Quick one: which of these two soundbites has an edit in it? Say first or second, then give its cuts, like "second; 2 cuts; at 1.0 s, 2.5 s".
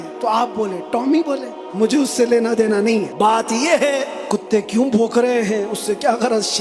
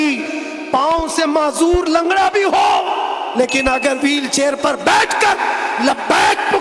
first; 3 cuts; at 1.6 s, 3.1 s, 4.2 s